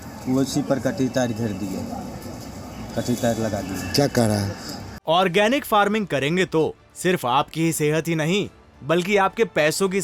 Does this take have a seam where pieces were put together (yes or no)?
yes